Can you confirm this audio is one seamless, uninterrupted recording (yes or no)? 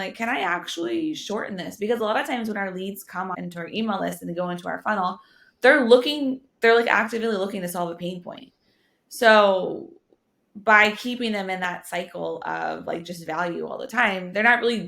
no